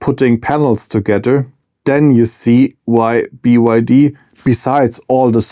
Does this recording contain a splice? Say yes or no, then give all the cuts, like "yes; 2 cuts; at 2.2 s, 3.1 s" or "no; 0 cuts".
no; 0 cuts